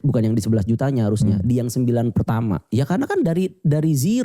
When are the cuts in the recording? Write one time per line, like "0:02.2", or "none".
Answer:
0:02.7